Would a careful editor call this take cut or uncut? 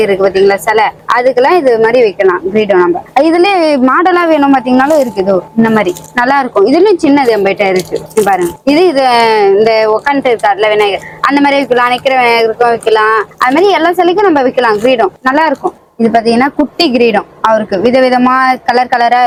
uncut